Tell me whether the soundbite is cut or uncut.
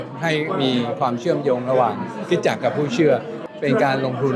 cut